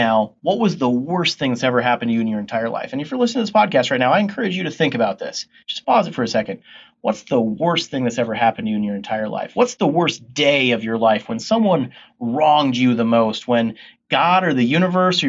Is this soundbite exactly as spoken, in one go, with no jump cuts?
yes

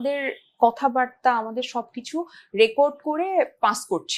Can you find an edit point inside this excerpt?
no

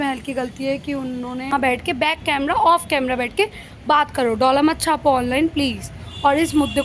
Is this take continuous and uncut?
no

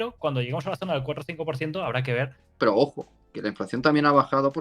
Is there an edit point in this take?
yes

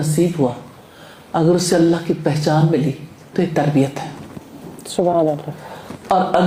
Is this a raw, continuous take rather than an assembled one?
yes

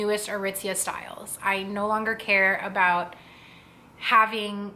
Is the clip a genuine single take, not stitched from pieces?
yes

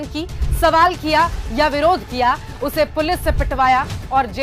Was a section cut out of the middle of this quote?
no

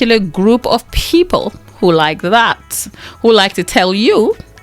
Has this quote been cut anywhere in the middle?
no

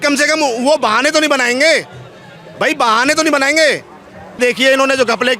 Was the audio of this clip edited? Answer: yes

